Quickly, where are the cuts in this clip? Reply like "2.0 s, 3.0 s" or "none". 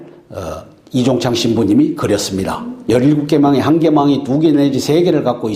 none